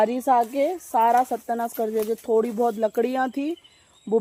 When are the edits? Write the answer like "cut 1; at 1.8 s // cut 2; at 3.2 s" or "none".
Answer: none